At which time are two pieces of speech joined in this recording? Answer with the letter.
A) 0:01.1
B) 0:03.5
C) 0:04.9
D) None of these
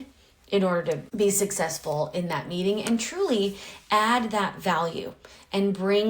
A